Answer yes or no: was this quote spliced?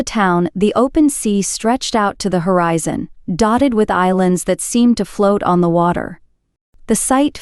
no